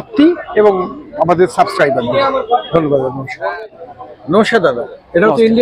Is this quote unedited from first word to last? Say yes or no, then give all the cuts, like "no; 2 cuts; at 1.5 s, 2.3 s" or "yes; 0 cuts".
yes; 0 cuts